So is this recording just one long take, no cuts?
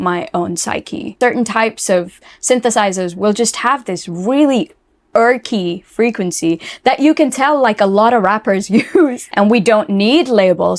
no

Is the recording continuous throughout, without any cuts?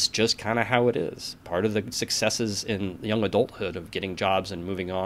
yes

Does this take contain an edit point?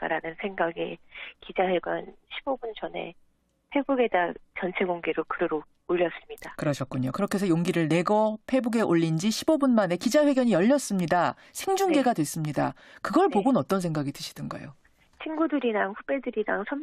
no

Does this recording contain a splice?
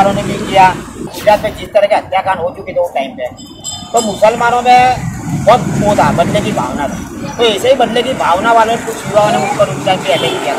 yes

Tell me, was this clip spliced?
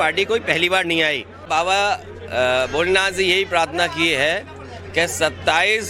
yes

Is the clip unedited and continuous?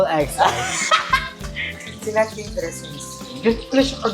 no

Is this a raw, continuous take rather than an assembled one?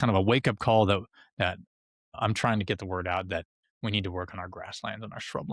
yes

